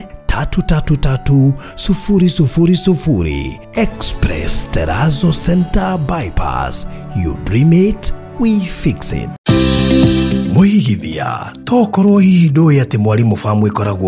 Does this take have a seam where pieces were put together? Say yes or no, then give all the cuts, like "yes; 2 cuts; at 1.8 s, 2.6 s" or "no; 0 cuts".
yes; 1 cut; at 9.3 s